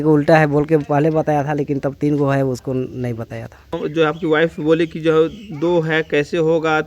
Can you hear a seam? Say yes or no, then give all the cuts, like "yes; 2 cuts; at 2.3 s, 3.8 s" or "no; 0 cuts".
no; 0 cuts